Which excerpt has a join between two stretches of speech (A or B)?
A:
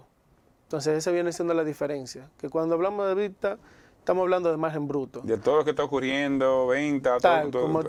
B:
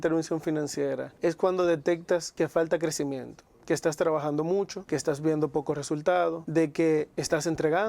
B